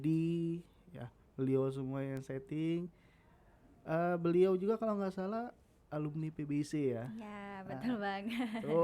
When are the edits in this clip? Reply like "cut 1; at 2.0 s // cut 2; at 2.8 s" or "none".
none

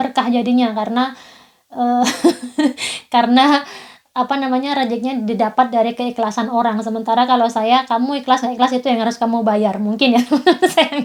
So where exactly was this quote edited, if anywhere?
none

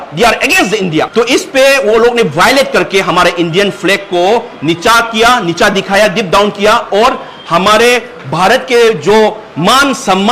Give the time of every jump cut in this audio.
cut 1; at 1.1 s

